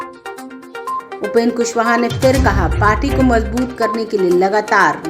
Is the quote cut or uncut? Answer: cut